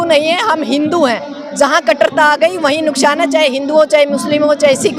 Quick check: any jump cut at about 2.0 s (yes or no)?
no